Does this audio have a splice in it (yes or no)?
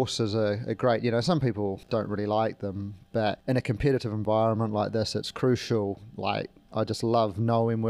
yes